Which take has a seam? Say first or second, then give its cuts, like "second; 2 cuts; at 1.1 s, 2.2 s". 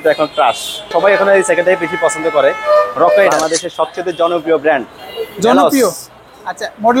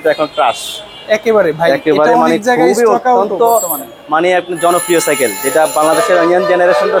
first; 2 cuts; at 0.9 s, 3.3 s